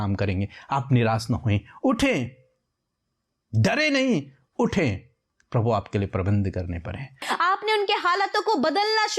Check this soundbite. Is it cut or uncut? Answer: cut